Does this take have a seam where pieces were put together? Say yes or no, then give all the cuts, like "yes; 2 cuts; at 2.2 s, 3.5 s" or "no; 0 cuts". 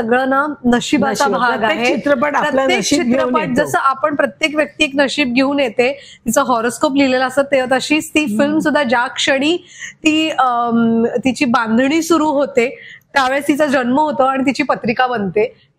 no; 0 cuts